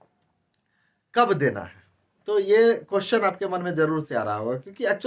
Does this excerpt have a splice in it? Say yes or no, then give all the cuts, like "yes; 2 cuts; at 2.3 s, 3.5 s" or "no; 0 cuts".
no; 0 cuts